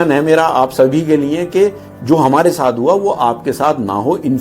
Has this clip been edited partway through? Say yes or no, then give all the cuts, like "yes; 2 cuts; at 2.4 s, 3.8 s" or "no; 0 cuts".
no; 0 cuts